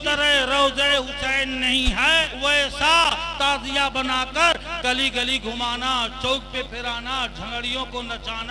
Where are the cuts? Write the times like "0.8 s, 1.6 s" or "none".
2.3 s